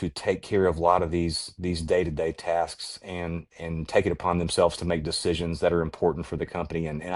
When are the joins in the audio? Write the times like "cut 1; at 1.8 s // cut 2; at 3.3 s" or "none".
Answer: none

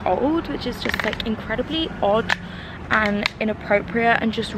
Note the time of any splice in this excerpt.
none

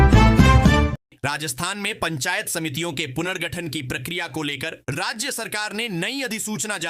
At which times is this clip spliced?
cut 1; at 1.2 s

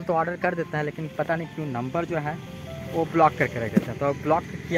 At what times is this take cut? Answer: none

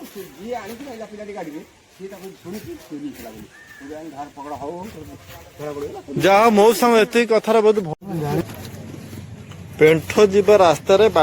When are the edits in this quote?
cut 1; at 7.9 s

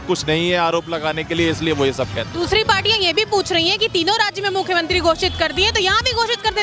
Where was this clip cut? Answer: none

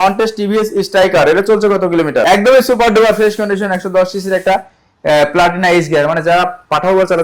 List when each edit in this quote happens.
cut 1; at 2.3 s

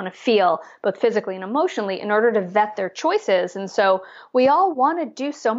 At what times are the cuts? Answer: none

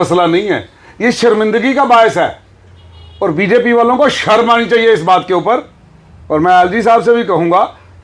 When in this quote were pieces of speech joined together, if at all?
none

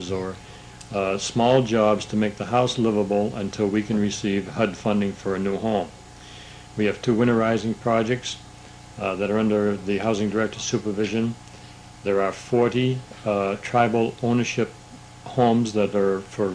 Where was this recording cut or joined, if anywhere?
cut 1; at 4.7 s

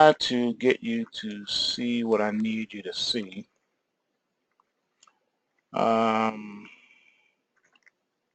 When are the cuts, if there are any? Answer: none

